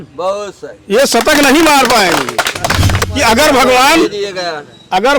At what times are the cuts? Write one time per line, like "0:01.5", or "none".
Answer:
0:03.1